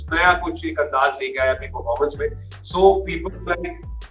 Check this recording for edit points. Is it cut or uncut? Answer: uncut